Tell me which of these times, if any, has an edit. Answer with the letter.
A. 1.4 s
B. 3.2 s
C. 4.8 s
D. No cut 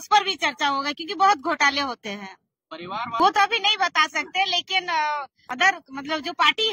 B